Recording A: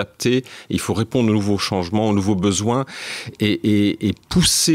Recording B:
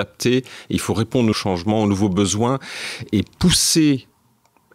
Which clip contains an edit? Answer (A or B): B